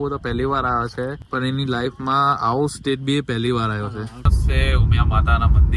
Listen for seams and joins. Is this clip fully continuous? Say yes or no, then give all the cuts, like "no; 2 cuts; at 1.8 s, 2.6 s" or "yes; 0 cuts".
no; 1 cut; at 4.3 s